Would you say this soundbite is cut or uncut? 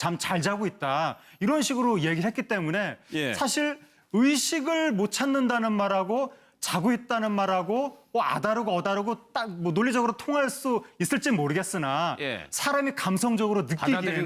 cut